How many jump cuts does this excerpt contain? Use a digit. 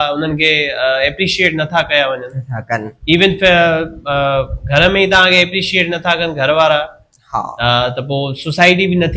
0